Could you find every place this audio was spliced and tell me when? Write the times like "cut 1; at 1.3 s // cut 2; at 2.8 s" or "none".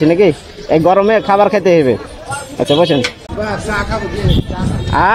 cut 1; at 3.2 s